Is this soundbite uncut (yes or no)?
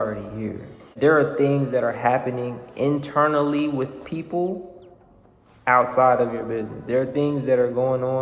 no